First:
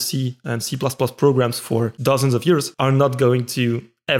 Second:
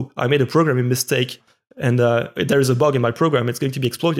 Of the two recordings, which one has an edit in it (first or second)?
first